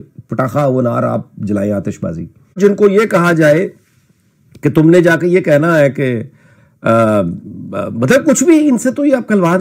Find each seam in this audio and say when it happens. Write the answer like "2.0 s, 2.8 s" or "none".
2.6 s